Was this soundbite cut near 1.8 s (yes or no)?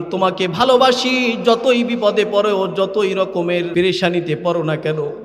no